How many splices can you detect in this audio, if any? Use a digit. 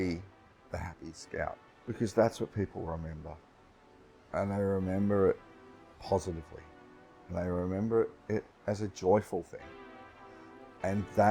1